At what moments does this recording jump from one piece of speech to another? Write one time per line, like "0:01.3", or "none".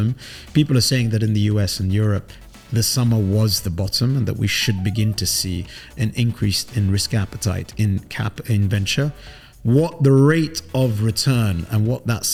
none